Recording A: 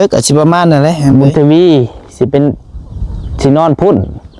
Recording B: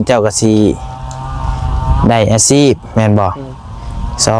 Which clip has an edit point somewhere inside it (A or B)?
A